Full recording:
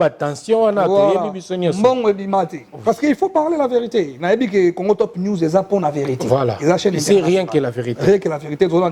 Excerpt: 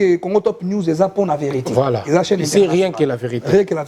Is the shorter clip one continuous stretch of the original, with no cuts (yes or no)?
yes